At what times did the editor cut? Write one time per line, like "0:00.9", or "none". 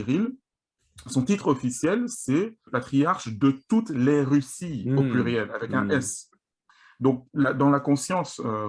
0:02.6

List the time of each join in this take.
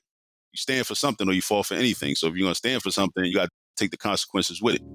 0:03.3

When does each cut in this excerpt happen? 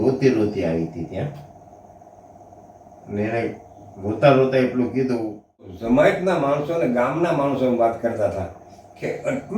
0:05.7

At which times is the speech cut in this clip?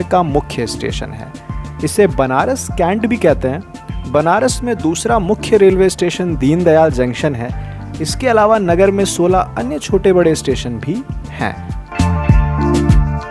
none

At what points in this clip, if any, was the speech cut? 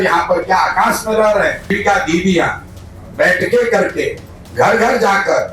0:01.8

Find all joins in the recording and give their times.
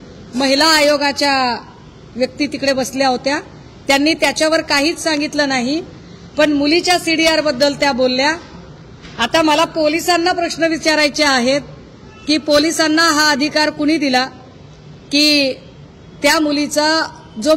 none

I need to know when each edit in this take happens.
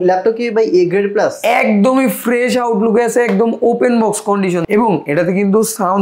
0:04.6

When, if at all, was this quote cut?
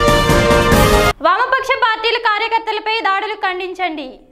0:01.0

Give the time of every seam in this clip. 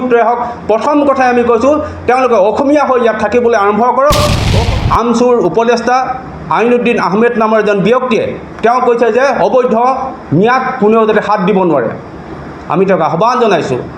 0:04.5

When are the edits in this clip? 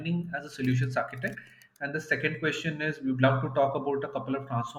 none

